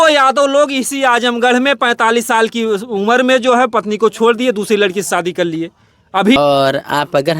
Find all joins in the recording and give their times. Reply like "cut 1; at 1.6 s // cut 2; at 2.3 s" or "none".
cut 1; at 6.4 s

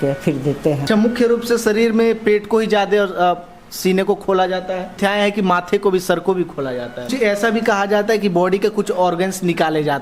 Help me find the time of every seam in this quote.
cut 1; at 0.8 s // cut 2; at 4.9 s // cut 3; at 7.1 s

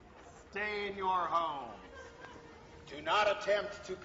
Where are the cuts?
cut 1; at 2.9 s

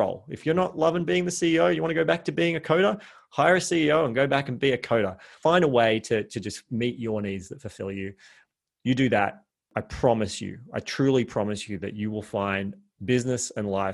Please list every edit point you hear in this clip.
cut 1; at 5.4 s // cut 2; at 9.7 s

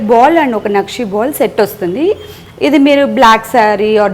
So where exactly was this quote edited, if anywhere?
none

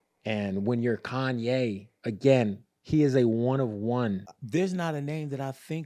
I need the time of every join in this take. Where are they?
cut 1; at 4.3 s

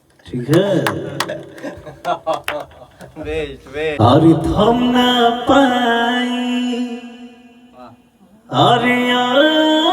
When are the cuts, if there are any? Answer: cut 1; at 4.0 s

